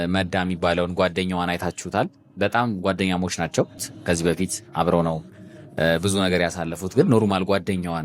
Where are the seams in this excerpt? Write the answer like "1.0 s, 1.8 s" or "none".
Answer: 3.9 s